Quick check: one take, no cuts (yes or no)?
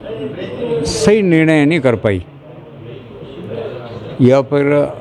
yes